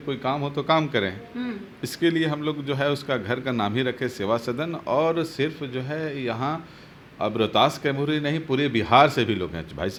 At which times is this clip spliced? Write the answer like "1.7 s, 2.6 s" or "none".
none